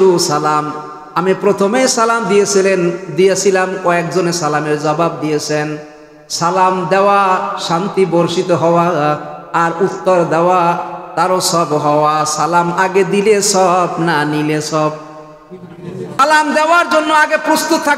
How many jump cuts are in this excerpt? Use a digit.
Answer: 1